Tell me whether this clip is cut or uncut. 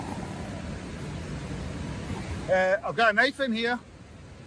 cut